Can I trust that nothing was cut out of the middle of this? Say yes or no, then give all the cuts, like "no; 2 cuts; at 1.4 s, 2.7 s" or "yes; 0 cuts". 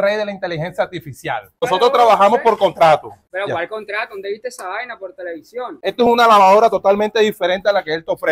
yes; 0 cuts